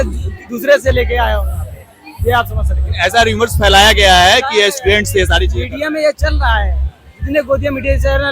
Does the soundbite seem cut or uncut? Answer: uncut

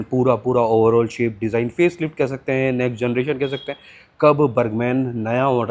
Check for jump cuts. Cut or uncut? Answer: uncut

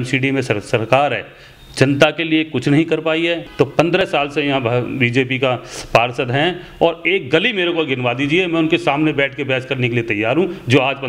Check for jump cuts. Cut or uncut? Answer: cut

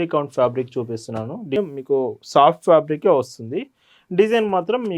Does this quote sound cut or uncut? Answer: cut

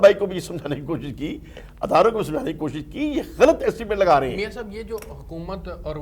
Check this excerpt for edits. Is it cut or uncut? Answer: uncut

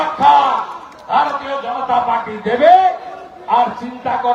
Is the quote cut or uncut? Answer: uncut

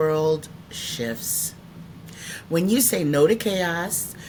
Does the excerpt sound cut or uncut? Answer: uncut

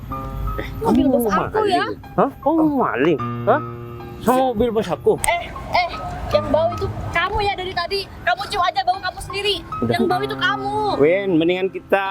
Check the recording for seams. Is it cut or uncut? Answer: cut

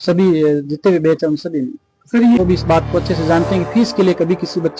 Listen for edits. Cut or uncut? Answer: cut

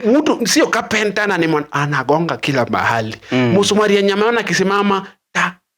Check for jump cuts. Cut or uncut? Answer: uncut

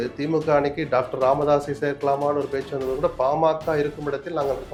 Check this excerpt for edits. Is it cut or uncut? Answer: uncut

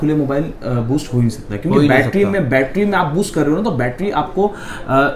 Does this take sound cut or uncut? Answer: uncut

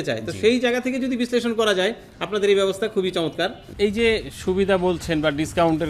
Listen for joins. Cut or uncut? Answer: cut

